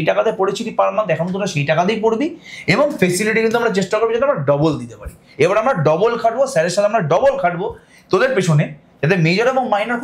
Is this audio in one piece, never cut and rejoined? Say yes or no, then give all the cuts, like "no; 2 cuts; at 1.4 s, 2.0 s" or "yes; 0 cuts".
yes; 0 cuts